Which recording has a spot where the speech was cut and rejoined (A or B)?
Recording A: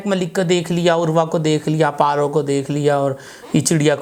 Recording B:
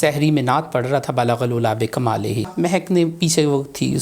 B